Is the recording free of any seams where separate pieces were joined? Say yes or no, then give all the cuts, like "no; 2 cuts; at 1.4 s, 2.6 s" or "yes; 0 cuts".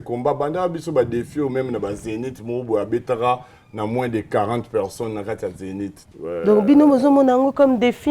no; 1 cut; at 6.0 s